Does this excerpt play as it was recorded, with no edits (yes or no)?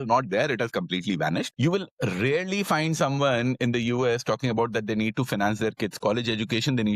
no